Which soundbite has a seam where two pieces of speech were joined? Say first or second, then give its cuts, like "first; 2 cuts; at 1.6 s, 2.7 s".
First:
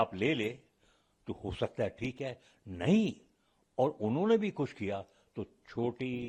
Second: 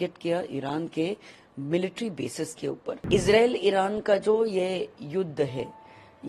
second; 1 cut; at 3.0 s